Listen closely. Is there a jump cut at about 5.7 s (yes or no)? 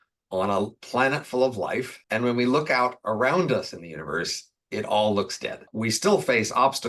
yes